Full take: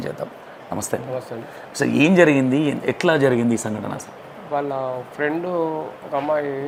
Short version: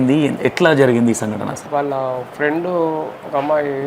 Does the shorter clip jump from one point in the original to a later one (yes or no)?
yes